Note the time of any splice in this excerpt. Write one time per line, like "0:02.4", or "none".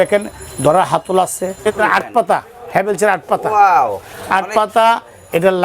0:01.7